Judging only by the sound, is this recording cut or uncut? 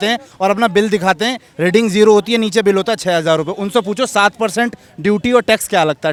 uncut